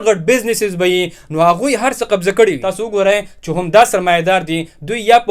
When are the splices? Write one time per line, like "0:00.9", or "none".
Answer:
0:02.7